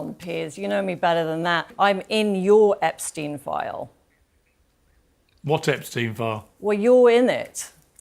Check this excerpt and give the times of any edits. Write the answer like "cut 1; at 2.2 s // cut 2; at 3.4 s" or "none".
cut 1; at 1.7 s